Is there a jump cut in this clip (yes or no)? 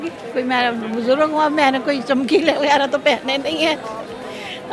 no